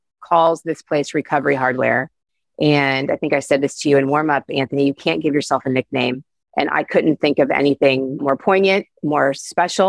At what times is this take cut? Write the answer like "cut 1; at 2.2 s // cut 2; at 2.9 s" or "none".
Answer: cut 1; at 8.2 s // cut 2; at 8.9 s